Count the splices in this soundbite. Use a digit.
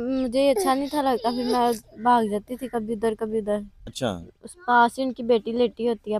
1